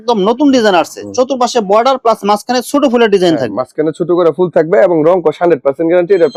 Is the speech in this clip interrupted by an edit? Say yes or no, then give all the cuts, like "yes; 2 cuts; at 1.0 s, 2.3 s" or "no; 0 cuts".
no; 0 cuts